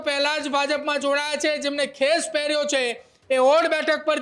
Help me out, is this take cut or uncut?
uncut